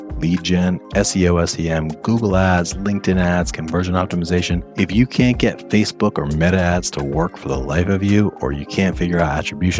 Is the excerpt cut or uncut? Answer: cut